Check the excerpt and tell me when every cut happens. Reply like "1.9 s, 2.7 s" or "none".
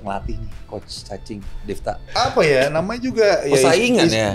2.1 s